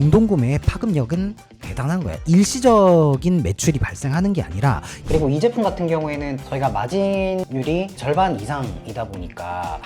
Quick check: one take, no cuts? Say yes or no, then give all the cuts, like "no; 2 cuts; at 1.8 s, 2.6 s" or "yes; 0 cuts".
no; 1 cut; at 4.9 s